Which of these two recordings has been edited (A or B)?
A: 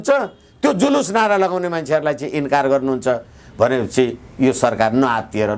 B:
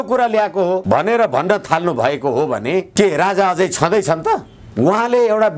B